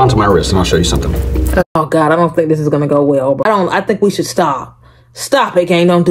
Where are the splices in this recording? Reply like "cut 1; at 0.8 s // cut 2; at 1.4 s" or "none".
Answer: none